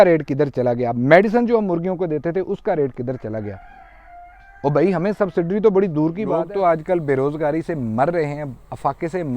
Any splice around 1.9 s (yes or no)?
no